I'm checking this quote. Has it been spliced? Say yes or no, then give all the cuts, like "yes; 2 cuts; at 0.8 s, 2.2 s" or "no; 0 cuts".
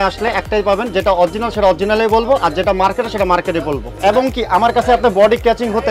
yes; 1 cut; at 3.9 s